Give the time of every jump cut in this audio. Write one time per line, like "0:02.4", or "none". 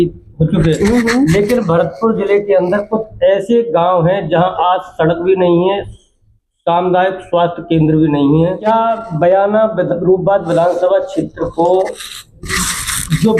0:08.6